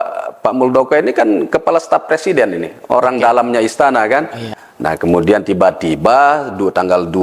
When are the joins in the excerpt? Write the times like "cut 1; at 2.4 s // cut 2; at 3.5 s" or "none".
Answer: none